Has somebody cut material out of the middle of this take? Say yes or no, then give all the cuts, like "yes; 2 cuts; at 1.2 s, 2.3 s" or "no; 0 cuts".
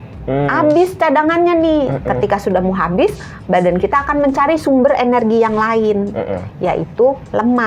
no; 0 cuts